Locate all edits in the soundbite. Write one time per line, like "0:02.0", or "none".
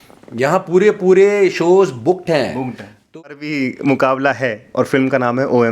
0:03.2